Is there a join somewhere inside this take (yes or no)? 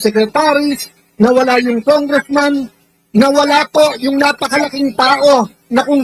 no